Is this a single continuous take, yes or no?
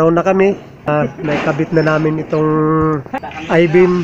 no